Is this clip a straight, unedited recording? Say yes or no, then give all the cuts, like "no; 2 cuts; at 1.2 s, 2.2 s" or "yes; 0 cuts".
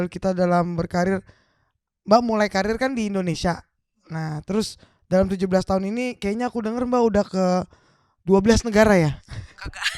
yes; 0 cuts